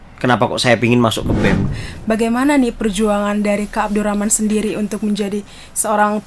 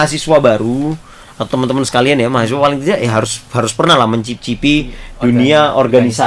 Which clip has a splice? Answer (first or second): first